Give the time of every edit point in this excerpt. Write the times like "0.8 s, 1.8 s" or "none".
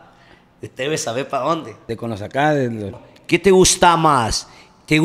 1.8 s, 3.0 s